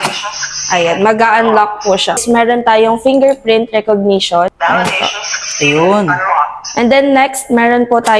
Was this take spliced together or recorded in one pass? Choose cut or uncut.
cut